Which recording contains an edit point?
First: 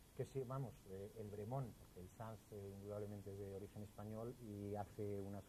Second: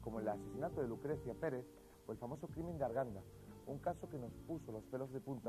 second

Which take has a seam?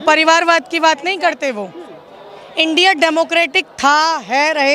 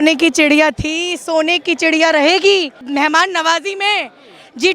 second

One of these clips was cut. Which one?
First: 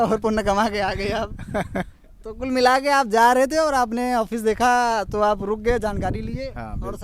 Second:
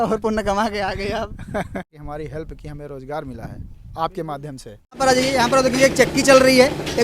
second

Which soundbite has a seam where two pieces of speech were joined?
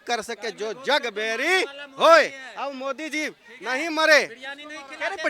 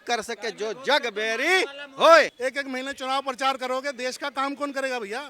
second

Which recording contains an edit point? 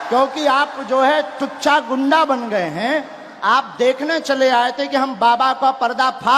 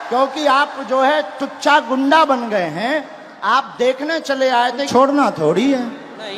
second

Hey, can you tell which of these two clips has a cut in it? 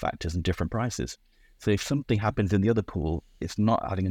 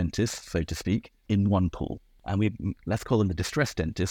second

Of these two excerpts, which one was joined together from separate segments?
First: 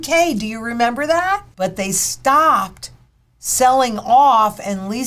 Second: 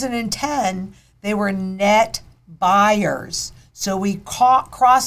first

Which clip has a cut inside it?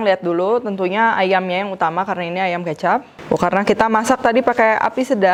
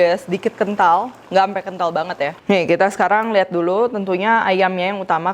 second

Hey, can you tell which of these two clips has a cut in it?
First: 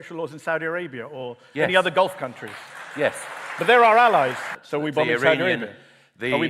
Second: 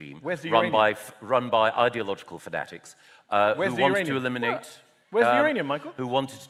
first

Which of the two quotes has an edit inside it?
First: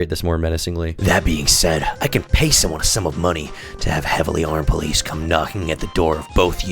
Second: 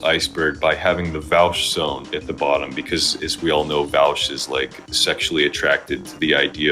first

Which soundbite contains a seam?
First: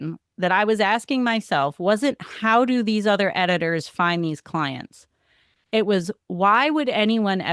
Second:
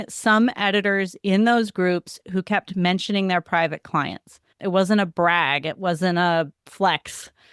second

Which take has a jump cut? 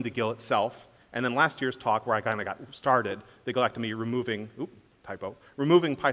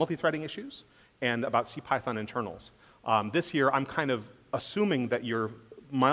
second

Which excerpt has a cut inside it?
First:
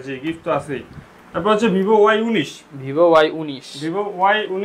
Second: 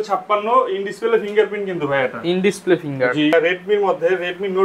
second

